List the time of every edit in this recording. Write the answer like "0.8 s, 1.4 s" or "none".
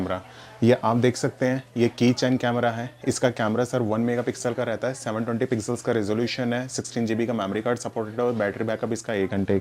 none